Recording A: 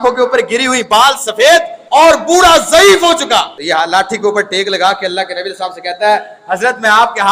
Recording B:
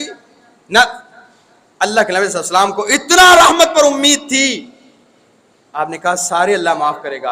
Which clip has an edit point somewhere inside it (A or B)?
A